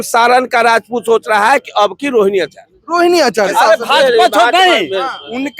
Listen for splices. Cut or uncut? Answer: cut